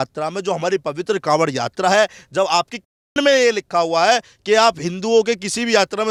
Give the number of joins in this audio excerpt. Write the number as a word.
zero